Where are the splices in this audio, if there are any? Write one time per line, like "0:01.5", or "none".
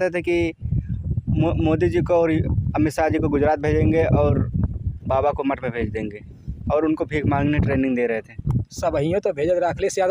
none